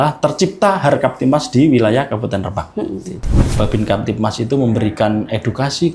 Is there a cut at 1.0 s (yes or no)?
no